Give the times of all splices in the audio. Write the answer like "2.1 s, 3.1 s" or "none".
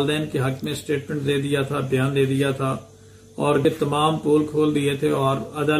3.6 s